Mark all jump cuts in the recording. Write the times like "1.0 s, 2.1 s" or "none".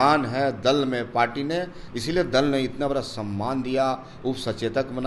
none